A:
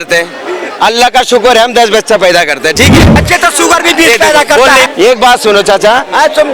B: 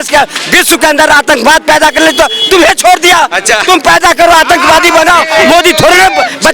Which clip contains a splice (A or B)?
A